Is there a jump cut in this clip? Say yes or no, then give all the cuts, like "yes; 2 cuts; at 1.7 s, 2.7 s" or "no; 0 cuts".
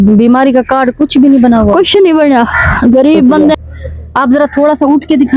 yes; 1 cut; at 3.6 s